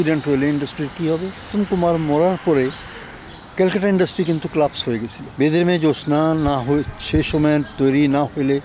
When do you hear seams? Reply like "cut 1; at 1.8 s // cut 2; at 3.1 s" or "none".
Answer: cut 1; at 1.4 s // cut 2; at 5.2 s